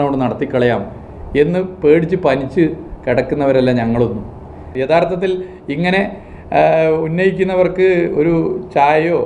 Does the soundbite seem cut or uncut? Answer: cut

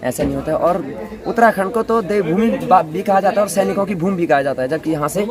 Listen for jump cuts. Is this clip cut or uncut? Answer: uncut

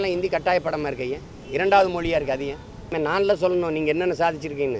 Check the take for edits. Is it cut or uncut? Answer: cut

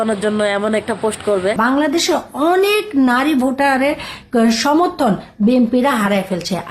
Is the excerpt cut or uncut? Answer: cut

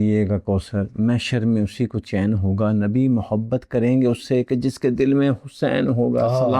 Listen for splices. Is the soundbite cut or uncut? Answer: uncut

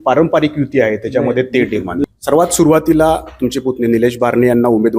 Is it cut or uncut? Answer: cut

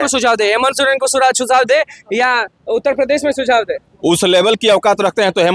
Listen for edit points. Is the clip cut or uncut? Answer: uncut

